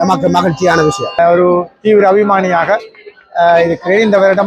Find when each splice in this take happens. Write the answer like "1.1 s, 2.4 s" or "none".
1.2 s